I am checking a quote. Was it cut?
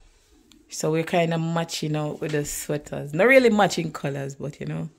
no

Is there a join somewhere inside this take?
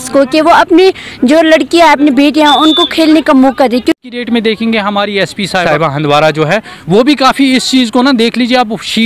yes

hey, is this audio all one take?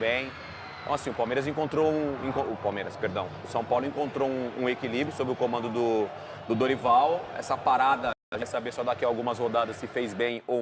no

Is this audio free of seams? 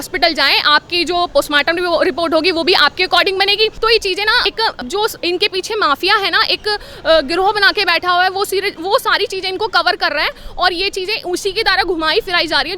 yes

